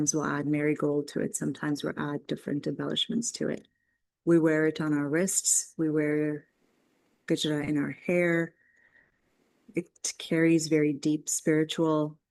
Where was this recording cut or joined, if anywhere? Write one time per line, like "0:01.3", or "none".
none